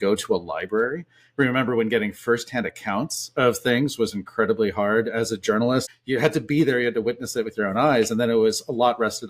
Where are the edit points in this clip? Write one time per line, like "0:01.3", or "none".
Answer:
0:05.9